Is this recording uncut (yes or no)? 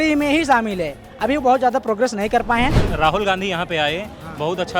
no